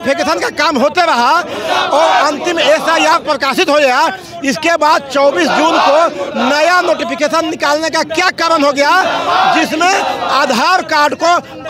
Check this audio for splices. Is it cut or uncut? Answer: uncut